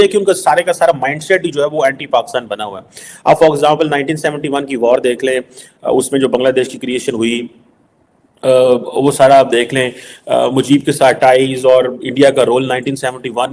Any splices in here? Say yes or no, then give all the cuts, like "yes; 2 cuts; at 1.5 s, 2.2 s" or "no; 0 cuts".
no; 0 cuts